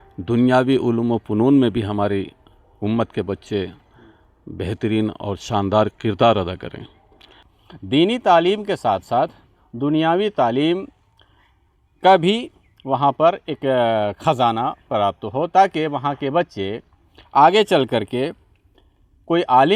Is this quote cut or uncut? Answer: cut